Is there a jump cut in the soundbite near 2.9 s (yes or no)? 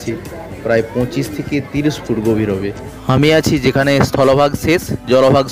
yes